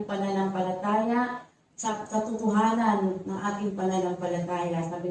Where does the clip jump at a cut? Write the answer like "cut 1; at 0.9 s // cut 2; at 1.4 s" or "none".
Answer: cut 1; at 1.9 s